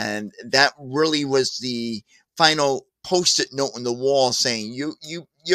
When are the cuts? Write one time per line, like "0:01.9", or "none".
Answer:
0:02.9